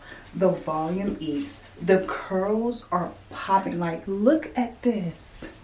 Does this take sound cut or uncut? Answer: cut